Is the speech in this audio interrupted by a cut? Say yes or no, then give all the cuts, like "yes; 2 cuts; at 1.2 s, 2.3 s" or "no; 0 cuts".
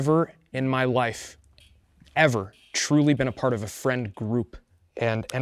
no; 0 cuts